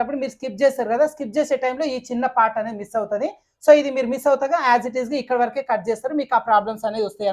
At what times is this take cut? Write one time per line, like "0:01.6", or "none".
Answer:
none